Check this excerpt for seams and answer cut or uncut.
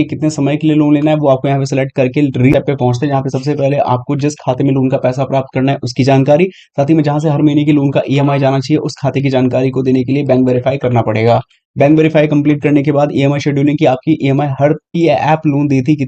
cut